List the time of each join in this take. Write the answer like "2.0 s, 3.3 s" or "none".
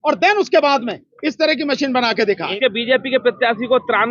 2.5 s